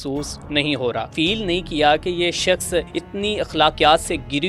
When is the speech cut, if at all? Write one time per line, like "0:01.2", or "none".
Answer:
0:01.1
0:03.0